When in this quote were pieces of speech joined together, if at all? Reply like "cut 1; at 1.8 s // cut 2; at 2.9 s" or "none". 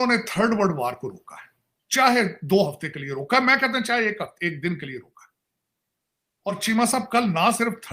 cut 1; at 6.5 s